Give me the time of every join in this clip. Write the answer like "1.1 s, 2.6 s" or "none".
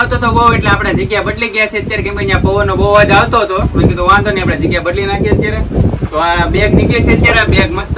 none